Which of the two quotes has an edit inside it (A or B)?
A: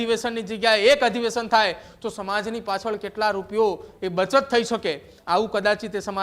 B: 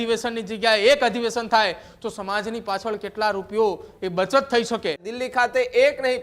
B